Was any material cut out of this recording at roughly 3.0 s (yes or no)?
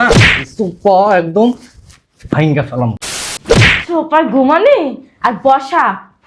yes